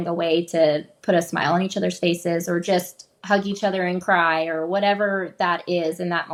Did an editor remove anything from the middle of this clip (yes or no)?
no